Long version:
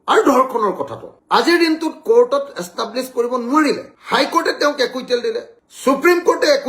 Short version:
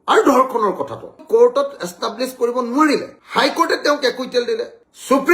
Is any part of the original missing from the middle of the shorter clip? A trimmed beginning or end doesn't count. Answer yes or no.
yes